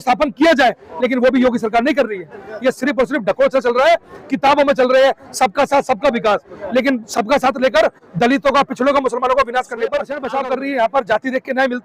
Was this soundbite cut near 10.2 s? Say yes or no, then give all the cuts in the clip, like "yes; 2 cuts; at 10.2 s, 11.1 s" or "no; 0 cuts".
yes; 1 cut; at 10.2 s